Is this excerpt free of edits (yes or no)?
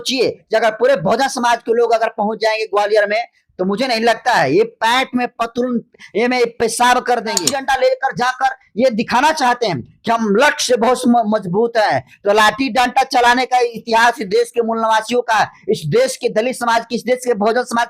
no